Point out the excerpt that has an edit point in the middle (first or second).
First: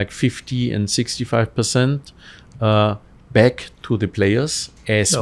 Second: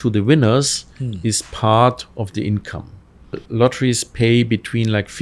second